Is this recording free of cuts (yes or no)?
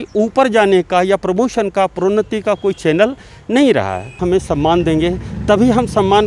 no